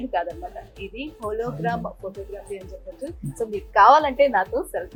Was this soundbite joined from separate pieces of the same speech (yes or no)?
no